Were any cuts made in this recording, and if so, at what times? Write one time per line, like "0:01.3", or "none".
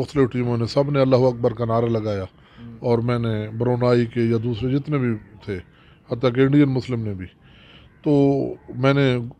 none